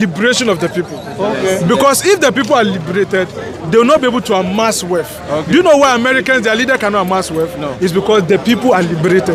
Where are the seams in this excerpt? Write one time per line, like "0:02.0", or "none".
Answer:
none